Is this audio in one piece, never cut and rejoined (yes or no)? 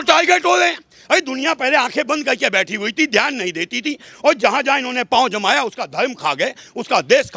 yes